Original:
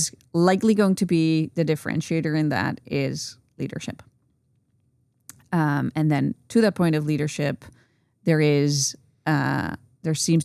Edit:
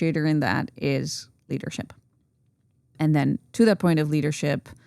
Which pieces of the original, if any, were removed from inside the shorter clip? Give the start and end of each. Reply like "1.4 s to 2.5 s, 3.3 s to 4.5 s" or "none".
5.1 s to 5.9 s